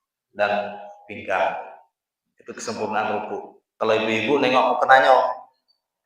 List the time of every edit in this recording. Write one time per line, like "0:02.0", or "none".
0:03.6